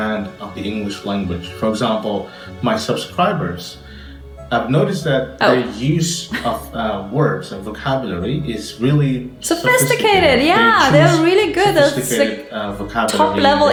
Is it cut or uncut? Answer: uncut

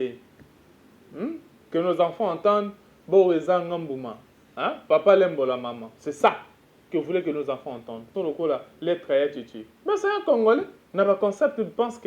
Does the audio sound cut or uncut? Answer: cut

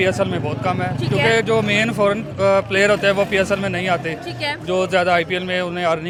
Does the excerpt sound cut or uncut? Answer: uncut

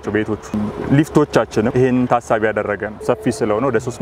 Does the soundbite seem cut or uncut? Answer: cut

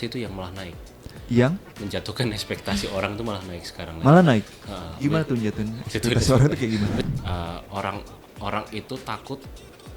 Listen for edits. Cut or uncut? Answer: cut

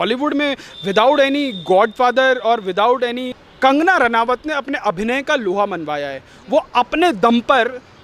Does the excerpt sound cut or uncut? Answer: cut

